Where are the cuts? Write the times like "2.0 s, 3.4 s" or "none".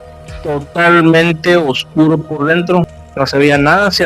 3.0 s